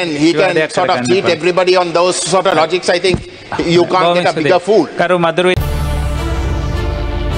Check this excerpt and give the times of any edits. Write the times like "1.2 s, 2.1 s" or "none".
5.6 s